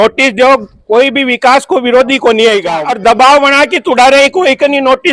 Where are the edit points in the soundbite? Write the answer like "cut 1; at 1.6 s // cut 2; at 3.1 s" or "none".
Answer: cut 1; at 2.8 s